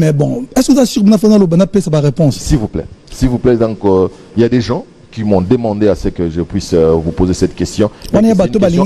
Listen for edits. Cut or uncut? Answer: uncut